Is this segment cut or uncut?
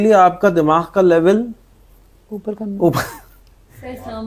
uncut